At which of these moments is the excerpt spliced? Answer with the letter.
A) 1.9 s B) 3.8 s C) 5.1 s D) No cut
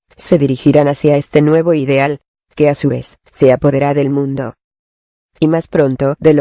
B